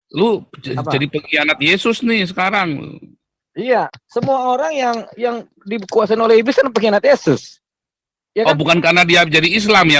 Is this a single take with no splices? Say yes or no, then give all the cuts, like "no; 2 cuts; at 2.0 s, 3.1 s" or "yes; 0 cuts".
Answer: yes; 0 cuts